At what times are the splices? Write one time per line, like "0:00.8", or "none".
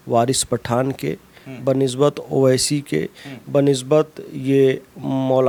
none